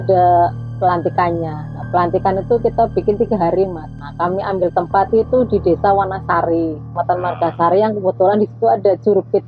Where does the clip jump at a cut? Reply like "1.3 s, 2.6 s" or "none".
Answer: 4.0 s, 6.9 s